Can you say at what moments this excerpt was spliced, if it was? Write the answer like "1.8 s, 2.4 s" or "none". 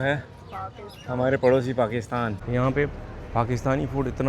2.4 s

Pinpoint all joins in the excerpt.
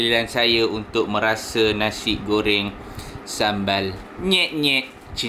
none

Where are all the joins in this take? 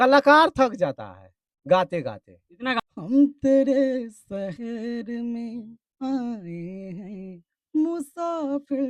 2.8 s

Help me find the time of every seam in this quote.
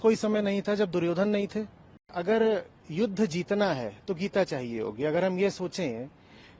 2.2 s

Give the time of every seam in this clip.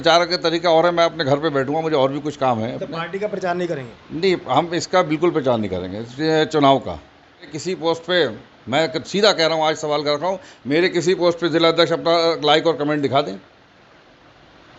7.5 s

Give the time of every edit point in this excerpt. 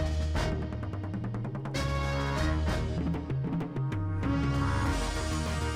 none

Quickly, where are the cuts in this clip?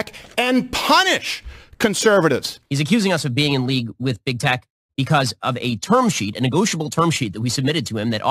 2.6 s

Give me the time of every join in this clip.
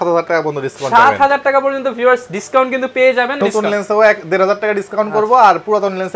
3.4 s

